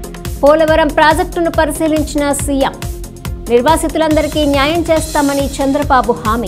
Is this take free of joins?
yes; 0 cuts

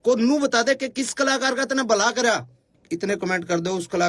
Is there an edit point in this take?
yes; 1 cut; at 2.7 s

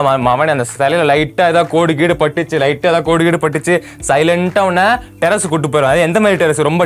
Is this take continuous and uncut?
yes; 0 cuts

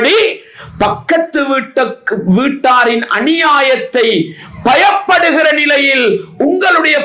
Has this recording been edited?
no; 0 cuts

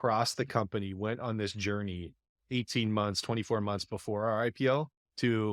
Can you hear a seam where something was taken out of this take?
no; 0 cuts

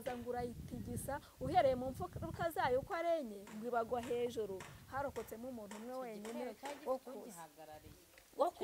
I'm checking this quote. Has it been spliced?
no; 0 cuts

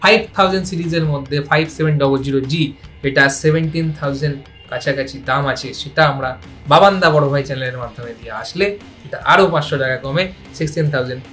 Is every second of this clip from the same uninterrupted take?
yes; 0 cuts

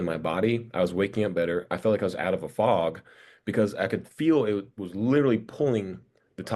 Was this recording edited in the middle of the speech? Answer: no; 0 cuts

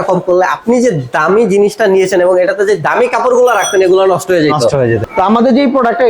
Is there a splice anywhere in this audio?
yes; 1 cut; at 5.0 s

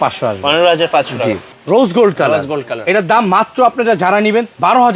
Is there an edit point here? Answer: yes; 1 cut; at 1.5 s

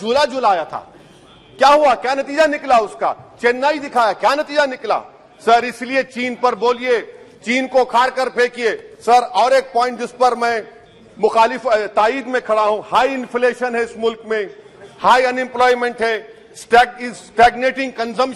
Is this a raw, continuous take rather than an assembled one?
yes; 0 cuts

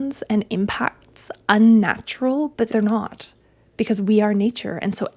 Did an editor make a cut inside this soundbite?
yes; 1 cut; at 2.7 s

